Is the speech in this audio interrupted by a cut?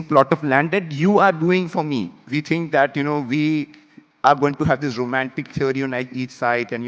yes; 1 cut; at 2.2 s

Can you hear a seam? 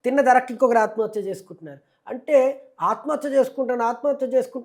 no; 0 cuts

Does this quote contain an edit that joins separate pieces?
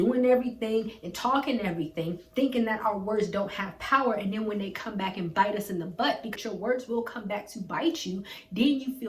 yes; 1 cut; at 6.3 s

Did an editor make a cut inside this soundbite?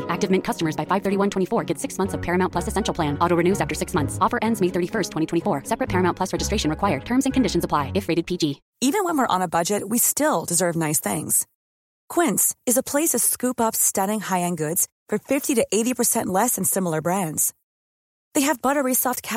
yes; 1 cut; at 8.7 s

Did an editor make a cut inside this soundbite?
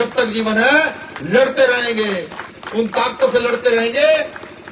no; 0 cuts

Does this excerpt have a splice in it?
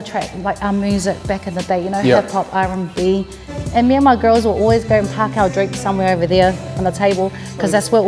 yes; 1 cut; at 3.5 s

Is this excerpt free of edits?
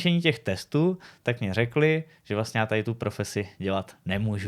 yes; 0 cuts

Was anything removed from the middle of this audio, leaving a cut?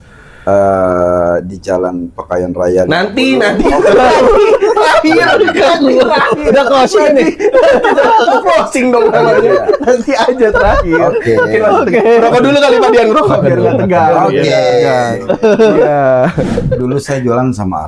yes; 1 cut; at 16.7 s

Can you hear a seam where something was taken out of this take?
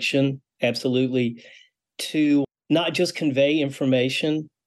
yes; 1 cut; at 2.6 s

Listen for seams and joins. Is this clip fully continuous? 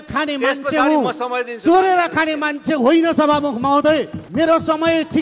no; 1 cut; at 4.2 s

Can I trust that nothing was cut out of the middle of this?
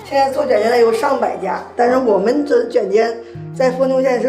yes; 0 cuts

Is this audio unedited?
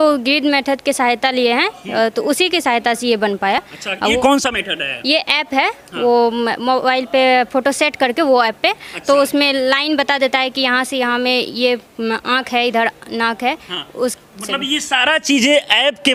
yes; 0 cuts

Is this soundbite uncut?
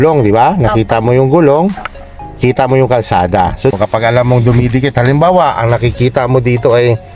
yes; 0 cuts

